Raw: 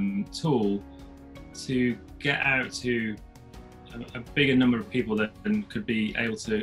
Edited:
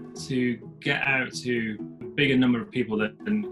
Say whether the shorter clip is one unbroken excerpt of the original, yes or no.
no